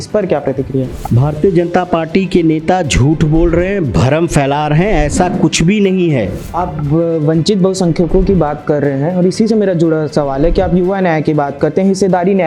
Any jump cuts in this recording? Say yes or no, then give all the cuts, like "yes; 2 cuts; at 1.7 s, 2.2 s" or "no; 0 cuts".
yes; 2 cuts; at 1.0 s, 6.4 s